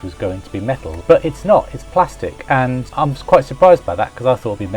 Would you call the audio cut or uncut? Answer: cut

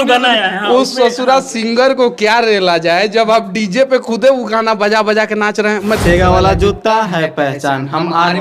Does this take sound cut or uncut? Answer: cut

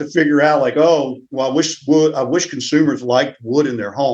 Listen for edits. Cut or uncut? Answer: uncut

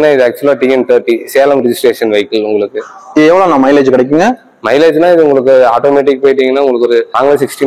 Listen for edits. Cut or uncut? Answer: uncut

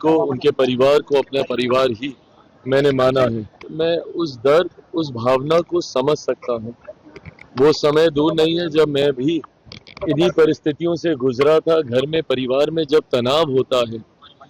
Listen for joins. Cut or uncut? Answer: cut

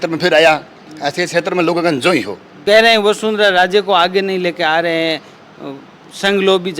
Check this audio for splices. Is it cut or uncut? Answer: cut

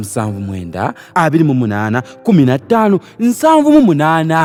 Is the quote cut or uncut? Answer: uncut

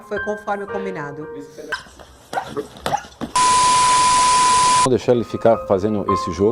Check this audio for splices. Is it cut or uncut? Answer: cut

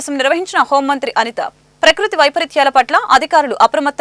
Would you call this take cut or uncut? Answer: uncut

